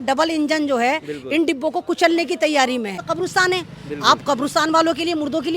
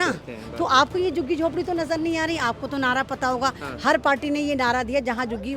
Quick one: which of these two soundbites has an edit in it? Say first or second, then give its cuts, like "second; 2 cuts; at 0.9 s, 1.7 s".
first; 1 cut; at 3.0 s